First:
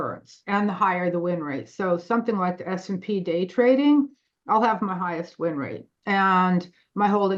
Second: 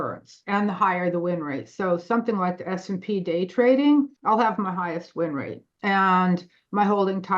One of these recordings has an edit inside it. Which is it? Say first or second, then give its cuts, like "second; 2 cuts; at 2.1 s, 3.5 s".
second; 1 cut; at 4.2 s